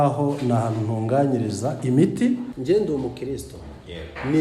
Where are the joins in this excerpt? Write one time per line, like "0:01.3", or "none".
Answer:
0:02.5